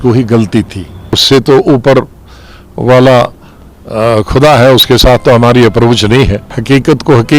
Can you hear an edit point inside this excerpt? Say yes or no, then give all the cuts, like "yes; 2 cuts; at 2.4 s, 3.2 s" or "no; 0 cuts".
yes; 2 cuts; at 1.2 s, 6.5 s